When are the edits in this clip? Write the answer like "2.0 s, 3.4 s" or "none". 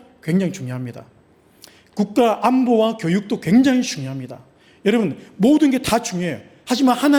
none